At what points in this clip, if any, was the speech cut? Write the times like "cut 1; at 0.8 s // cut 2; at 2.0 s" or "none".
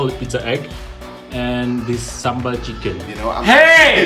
cut 1; at 3.1 s